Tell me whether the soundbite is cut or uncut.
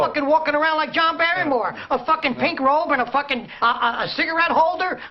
uncut